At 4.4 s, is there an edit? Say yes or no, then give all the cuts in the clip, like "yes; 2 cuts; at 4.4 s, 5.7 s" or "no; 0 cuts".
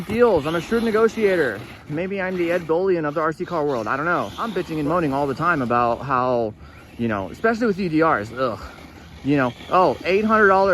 yes; 1 cut; at 4.4 s